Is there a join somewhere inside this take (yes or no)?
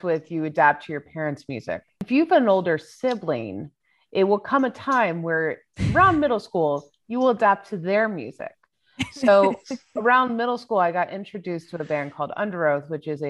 yes